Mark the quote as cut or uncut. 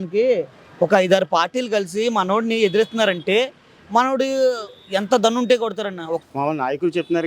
cut